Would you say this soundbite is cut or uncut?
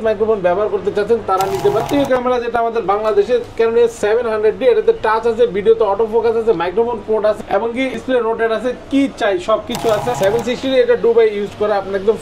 cut